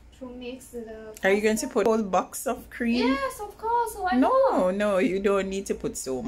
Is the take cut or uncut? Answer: cut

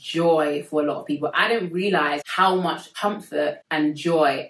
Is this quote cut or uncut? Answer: cut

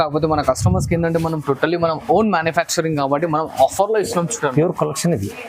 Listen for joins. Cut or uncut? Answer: uncut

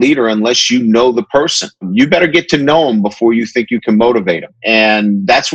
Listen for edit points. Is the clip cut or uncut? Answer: cut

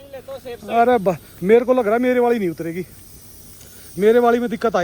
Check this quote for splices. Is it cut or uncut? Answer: uncut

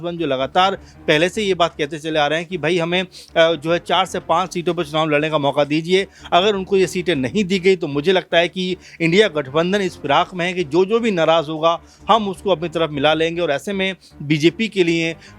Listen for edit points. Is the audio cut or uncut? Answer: uncut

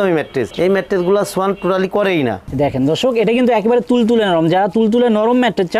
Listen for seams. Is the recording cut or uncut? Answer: cut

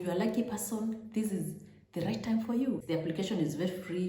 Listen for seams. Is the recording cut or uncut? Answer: cut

